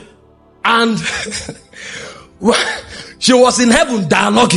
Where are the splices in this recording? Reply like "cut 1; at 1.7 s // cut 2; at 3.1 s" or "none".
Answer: none